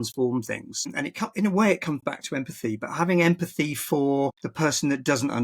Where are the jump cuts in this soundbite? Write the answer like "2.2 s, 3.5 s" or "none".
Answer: 0.9 s, 4.4 s